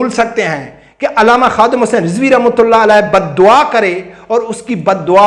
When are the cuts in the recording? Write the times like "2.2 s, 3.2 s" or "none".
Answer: none